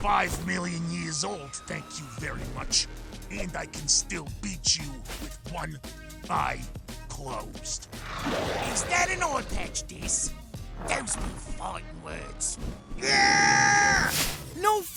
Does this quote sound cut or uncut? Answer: uncut